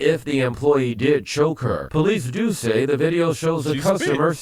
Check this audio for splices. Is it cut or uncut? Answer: uncut